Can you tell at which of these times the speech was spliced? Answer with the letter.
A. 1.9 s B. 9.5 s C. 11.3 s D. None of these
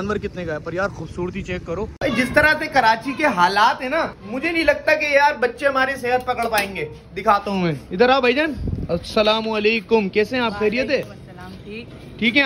A